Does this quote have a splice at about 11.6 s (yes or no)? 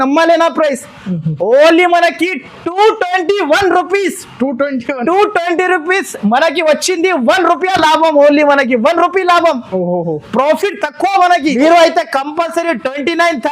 yes